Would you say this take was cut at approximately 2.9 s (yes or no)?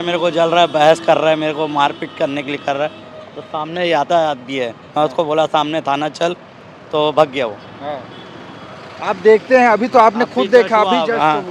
no